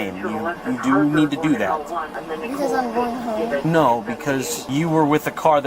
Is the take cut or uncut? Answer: cut